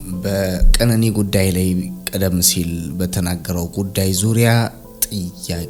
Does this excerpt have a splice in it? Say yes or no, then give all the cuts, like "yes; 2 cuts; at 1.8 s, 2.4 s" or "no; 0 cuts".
no; 0 cuts